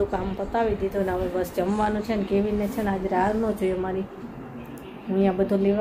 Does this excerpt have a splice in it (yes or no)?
no